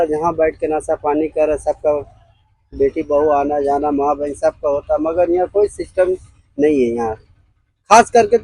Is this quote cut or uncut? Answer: uncut